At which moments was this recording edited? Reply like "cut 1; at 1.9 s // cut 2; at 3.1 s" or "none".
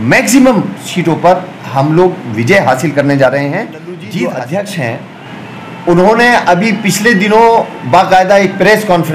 cut 1; at 4.0 s